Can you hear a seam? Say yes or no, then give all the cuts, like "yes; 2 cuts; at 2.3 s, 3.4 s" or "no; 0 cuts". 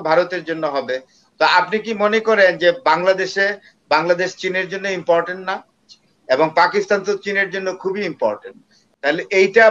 yes; 1 cut; at 8.8 s